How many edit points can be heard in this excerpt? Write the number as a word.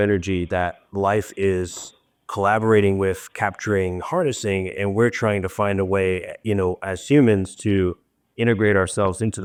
zero